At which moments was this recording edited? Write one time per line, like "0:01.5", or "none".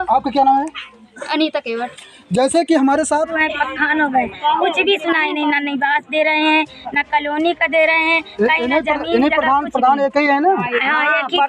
0:03.4